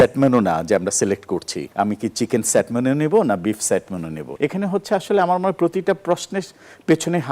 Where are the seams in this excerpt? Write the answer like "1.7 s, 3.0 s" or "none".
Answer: 1.6 s, 4.2 s

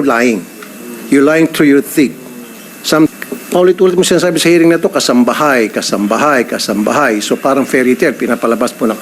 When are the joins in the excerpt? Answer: 3.1 s

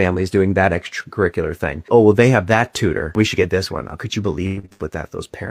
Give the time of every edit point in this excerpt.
none

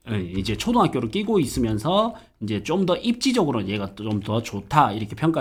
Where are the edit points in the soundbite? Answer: none

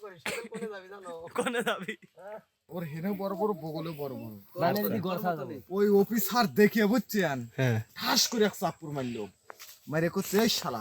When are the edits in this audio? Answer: 2.7 s

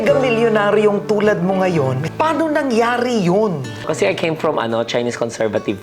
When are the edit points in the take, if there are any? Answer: none

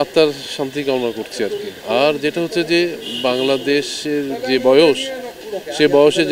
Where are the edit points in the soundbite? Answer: none

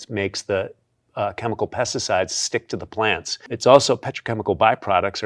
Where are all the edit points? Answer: 3.5 s

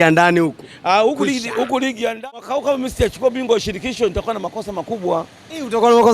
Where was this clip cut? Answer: 2.1 s

